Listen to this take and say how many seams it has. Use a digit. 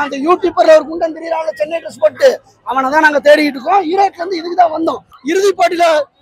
1